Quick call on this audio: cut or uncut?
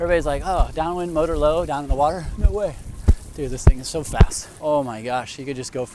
cut